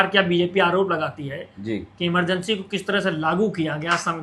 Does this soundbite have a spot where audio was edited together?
no; 0 cuts

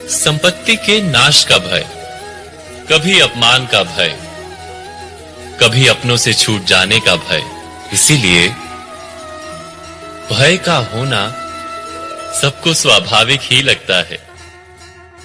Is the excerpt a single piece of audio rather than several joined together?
no; 1 cut; at 14.3 s

